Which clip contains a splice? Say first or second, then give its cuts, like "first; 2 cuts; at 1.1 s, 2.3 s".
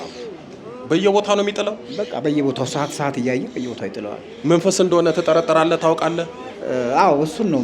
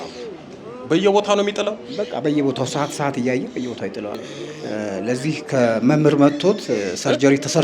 second; 1 cut; at 4.3 s